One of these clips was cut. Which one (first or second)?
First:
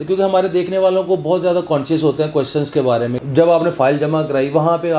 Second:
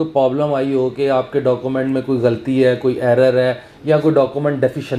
first